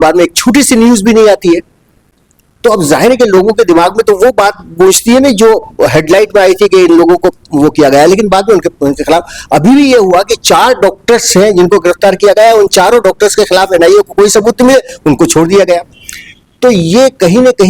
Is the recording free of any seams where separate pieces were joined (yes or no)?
yes